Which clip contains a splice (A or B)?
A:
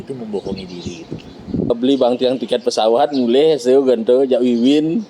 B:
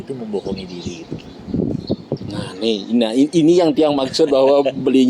A